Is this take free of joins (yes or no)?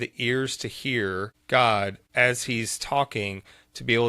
no